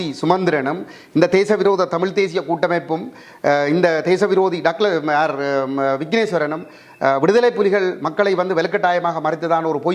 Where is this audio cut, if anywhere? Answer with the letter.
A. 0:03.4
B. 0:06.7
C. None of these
C